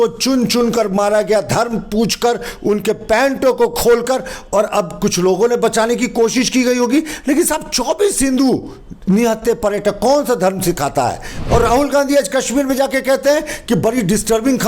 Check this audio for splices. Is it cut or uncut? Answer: cut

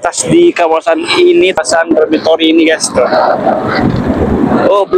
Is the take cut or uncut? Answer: cut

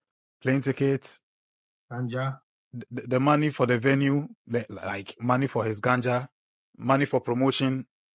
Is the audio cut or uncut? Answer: uncut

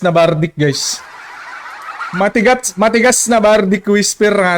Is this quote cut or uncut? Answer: uncut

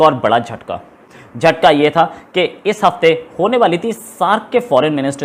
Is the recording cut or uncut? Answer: uncut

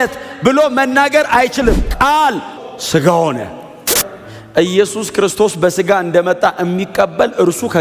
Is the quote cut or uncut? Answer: cut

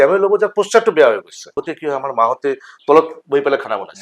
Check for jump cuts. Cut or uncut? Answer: cut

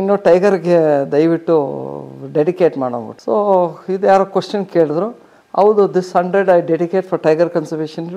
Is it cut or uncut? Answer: uncut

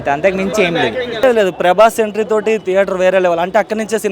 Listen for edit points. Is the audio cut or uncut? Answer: cut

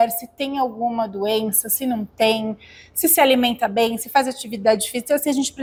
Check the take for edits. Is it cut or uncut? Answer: uncut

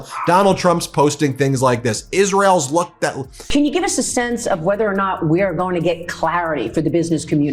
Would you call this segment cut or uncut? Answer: cut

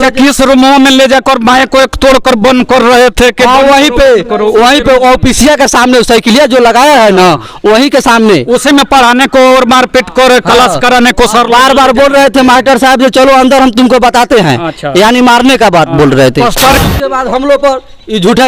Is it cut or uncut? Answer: cut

